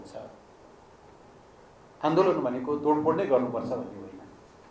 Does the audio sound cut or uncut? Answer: cut